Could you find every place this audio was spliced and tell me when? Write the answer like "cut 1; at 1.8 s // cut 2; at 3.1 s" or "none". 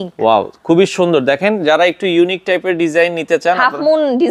none

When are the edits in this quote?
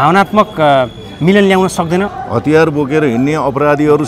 cut 1; at 2.1 s

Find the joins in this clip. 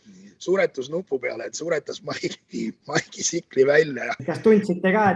cut 1; at 4.1 s

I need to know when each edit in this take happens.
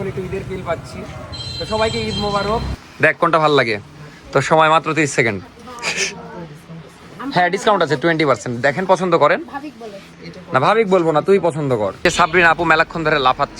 cut 1; at 2.8 s // cut 2; at 12.0 s

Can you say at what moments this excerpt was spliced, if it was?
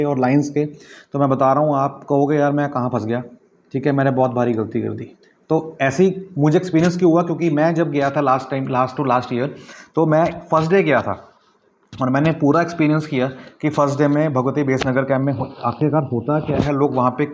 none

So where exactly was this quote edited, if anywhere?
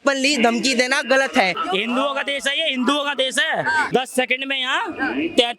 cut 1; at 1.6 s // cut 2; at 3.9 s

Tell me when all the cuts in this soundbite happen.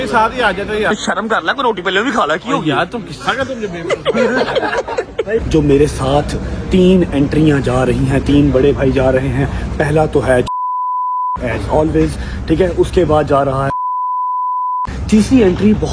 cut 1; at 0.9 s // cut 2; at 5.4 s

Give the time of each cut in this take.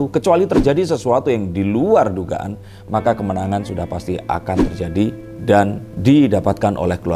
none

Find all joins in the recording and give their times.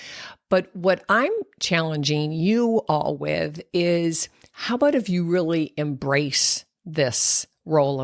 none

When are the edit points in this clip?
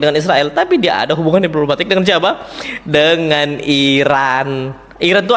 none

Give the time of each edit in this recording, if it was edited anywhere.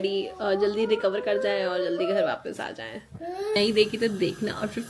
cut 1; at 3.5 s

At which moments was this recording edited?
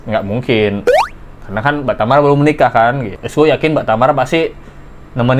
none

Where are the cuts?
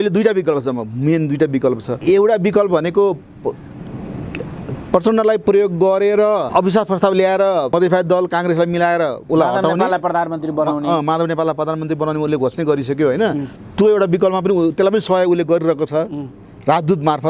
cut 1; at 1.9 s // cut 2; at 6.5 s // cut 3; at 7.7 s // cut 4; at 9.2 s

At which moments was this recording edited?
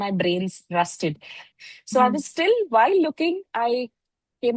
none

